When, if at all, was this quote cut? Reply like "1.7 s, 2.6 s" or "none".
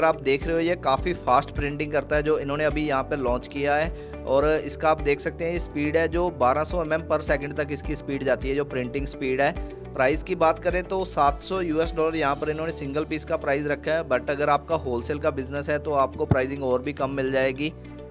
none